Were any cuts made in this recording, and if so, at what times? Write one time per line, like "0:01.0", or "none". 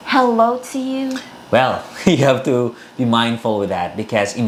none